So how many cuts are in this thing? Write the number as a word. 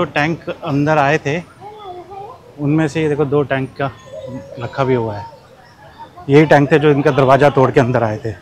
zero